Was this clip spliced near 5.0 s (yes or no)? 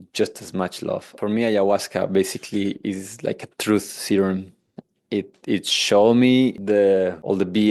no